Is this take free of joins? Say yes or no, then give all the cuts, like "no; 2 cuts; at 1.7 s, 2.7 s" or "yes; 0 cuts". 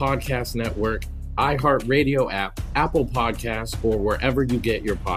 no; 1 cut; at 1.0 s